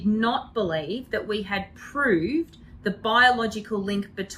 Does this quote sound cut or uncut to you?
uncut